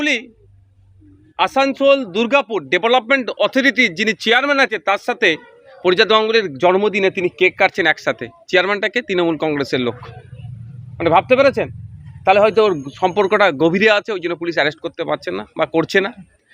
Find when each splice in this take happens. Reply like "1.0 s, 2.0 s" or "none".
none